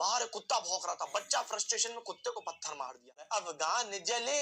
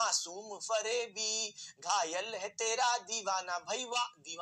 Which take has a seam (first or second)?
first